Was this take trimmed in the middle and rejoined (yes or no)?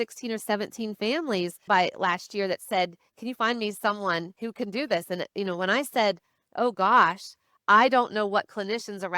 yes